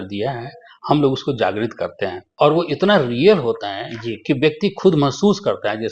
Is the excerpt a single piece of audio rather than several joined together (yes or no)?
no